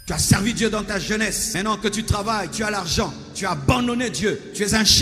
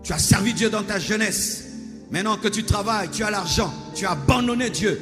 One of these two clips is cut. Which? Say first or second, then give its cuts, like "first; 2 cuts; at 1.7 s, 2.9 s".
first; 1 cut; at 1.5 s